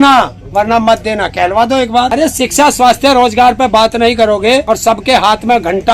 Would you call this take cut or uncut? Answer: cut